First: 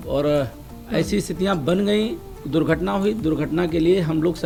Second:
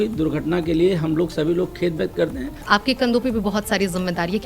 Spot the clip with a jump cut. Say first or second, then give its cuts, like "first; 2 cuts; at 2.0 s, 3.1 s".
second; 1 cut; at 2.6 s